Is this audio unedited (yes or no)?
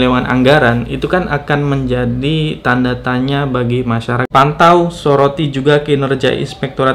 no